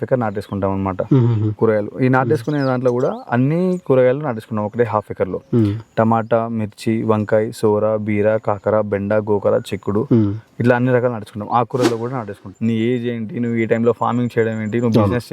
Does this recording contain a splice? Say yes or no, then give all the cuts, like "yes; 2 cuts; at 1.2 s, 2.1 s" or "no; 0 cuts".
yes; 1 cut; at 12.5 s